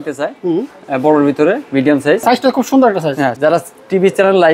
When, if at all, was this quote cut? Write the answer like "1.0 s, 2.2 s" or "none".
2.2 s, 3.3 s